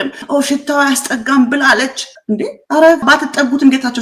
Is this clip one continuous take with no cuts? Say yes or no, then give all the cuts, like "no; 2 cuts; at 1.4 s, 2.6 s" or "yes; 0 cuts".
yes; 0 cuts